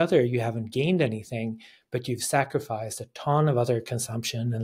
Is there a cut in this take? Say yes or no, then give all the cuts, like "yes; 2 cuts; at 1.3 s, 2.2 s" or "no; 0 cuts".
no; 0 cuts